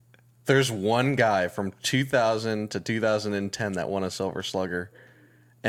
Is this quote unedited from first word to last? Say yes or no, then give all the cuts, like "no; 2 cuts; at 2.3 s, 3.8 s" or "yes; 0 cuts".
yes; 0 cuts